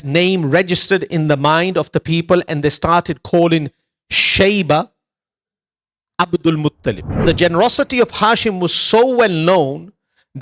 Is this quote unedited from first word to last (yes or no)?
no